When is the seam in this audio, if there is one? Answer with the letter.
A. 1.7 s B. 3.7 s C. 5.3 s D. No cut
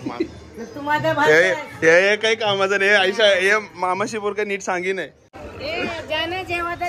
C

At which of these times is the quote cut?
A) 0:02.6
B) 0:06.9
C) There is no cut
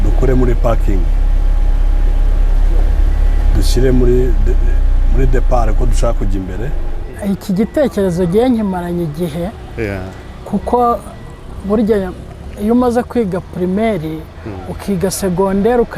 B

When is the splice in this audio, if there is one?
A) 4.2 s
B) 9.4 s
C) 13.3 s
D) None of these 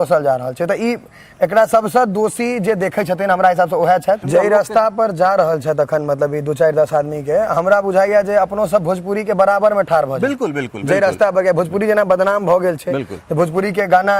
A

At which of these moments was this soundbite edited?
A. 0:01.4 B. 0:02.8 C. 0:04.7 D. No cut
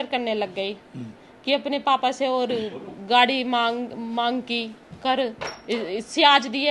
D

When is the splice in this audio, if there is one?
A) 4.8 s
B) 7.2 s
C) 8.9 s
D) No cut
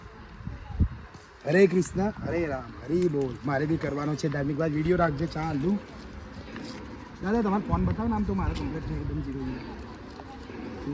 D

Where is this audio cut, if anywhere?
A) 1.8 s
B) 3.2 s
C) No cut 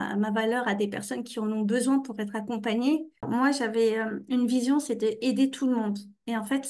B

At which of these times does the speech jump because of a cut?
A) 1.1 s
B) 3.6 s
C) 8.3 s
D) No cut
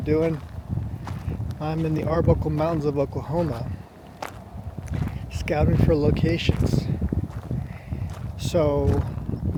D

